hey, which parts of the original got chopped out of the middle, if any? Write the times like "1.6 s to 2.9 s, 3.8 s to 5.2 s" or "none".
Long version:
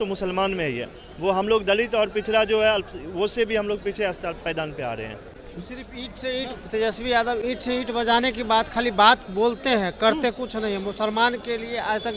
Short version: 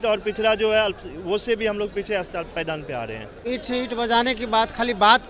5.3 s to 7.4 s